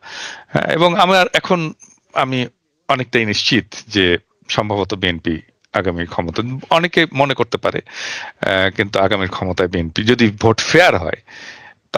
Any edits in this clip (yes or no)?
no